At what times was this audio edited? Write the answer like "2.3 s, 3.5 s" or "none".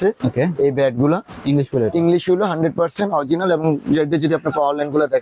none